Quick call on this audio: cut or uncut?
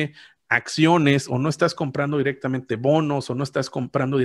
uncut